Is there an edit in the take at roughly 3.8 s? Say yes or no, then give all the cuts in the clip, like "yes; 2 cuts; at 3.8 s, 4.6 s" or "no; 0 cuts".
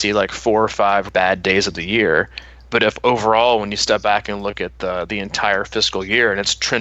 no; 1 cut; at 1.1 s